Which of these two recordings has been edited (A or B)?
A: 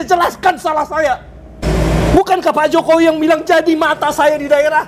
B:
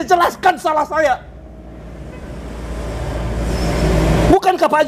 A